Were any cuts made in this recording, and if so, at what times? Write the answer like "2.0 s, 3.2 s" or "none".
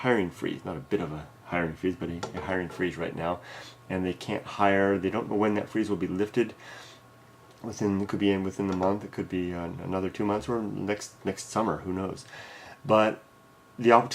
2.3 s